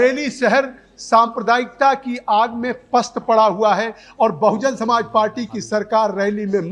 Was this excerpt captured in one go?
yes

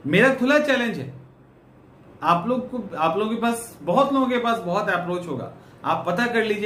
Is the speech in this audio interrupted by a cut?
no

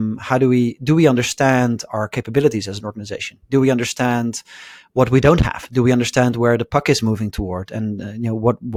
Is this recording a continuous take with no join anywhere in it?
yes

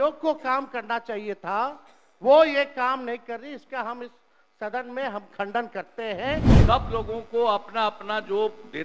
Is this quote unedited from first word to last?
no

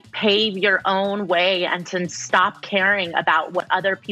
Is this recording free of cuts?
yes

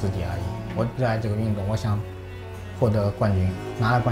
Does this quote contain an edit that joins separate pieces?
yes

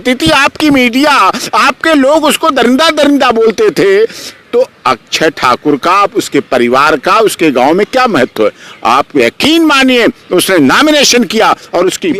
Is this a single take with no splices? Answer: yes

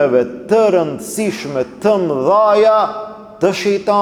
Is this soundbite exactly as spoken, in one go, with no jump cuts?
yes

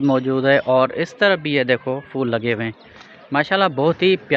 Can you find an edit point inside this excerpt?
no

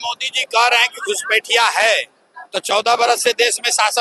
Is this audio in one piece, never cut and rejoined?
yes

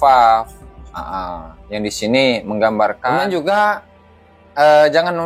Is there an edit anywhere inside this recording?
yes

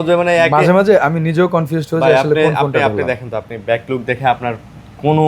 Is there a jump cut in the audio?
no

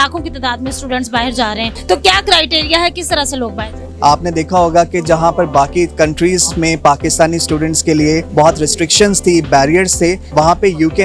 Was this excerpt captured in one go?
no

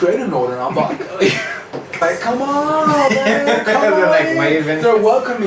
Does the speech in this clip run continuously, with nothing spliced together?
no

